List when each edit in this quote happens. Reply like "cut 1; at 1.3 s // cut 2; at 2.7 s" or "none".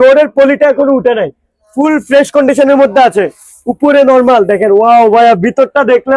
none